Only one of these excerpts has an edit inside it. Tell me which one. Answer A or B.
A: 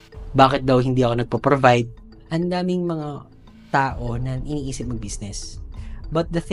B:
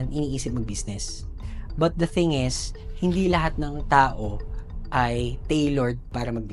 A